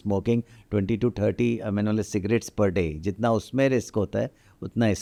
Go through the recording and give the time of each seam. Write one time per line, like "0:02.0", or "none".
none